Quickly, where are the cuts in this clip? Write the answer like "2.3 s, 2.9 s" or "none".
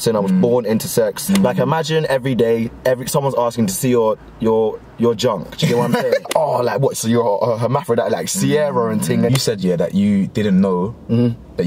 1.2 s, 6.3 s, 9.3 s